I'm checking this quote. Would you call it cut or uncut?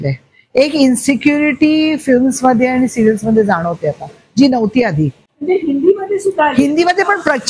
uncut